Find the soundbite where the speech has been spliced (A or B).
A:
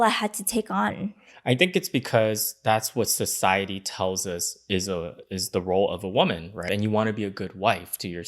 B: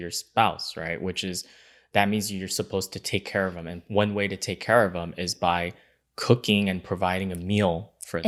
A